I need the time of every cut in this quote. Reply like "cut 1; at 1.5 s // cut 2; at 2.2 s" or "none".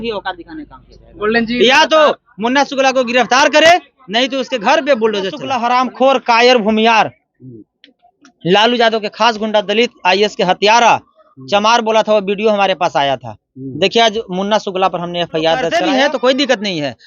cut 1; at 5.4 s // cut 2; at 15.7 s